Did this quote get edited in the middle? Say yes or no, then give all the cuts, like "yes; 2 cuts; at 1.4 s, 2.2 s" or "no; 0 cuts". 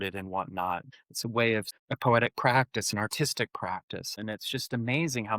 yes; 3 cuts; at 0.9 s, 1.7 s, 4.2 s